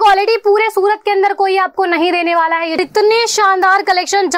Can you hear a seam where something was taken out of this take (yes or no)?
yes